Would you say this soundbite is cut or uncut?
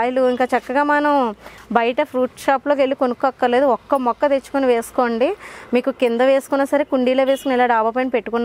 uncut